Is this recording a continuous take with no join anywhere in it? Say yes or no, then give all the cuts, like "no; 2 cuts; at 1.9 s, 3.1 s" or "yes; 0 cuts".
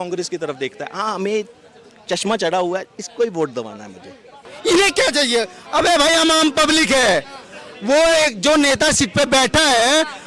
no; 1 cut; at 4.3 s